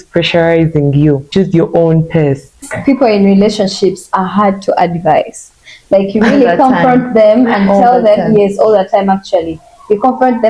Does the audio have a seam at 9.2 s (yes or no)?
no